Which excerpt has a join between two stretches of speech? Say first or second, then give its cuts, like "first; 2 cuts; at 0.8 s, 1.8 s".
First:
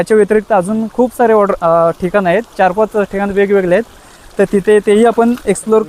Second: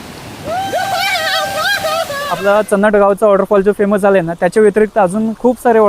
second; 1 cut; at 2.2 s